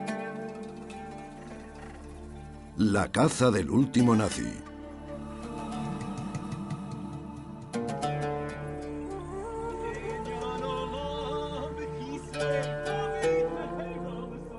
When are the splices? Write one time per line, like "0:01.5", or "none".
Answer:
none